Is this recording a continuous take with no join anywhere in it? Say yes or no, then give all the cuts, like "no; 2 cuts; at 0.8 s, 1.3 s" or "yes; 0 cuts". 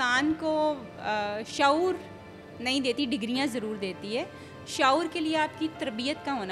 yes; 0 cuts